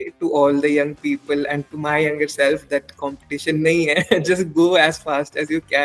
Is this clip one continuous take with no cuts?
yes; 0 cuts

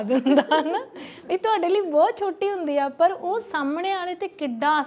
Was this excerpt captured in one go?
yes; 0 cuts

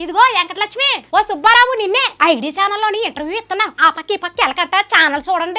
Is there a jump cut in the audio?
yes; 2 cuts; at 0.9 s, 2.1 s

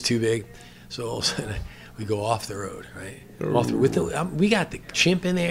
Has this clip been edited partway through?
no; 0 cuts

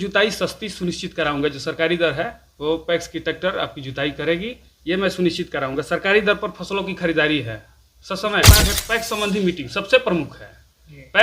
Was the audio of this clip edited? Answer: yes; 1 cut; at 8.6 s

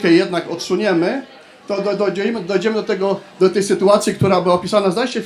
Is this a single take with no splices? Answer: yes; 0 cuts

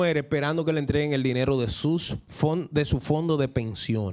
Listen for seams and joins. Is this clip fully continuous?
no; 1 cut; at 2.2 s

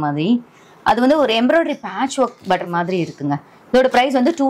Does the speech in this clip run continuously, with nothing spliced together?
yes; 0 cuts

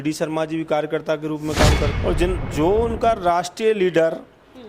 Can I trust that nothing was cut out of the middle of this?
no; 1 cut; at 1.9 s

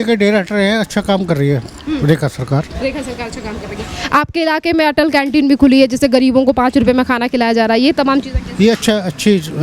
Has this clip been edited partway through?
no; 0 cuts

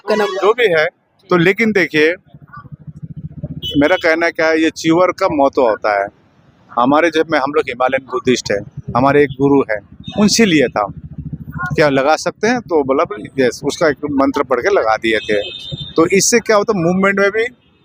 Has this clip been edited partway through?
no; 0 cuts

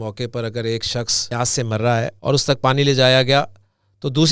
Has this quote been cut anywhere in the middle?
yes; 2 cuts; at 1.2 s, 2.2 s

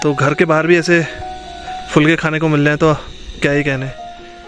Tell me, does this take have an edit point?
no; 0 cuts

